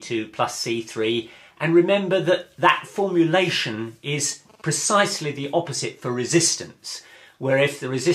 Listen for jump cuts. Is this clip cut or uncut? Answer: cut